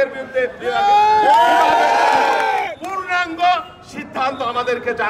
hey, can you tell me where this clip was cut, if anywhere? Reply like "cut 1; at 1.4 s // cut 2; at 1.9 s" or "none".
none